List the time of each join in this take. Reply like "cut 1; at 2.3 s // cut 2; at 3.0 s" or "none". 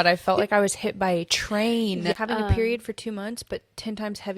cut 1; at 2.1 s

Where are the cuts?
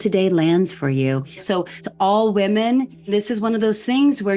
cut 1; at 1.5 s // cut 2; at 3.1 s

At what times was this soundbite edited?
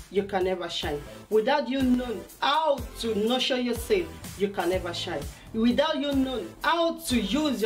cut 1; at 4.6 s

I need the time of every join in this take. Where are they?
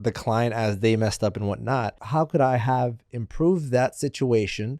cut 1; at 2.0 s

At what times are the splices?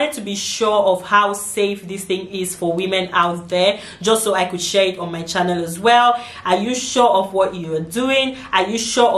cut 1; at 6.3 s

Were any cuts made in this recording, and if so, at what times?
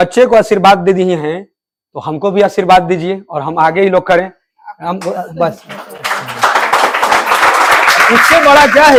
none

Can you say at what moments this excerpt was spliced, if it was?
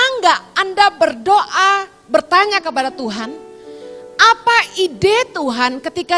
none

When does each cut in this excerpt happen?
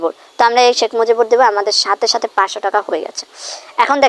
none

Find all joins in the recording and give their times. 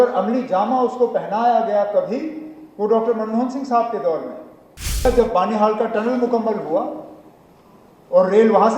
cut 1; at 5.1 s

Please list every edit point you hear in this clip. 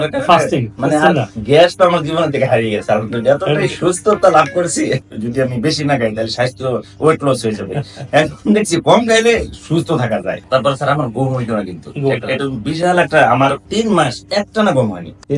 cut 1; at 5.0 s // cut 2; at 10.4 s

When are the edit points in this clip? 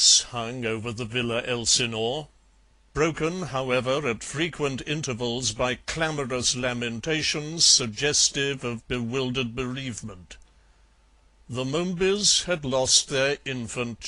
none

